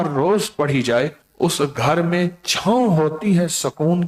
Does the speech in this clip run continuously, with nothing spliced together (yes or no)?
no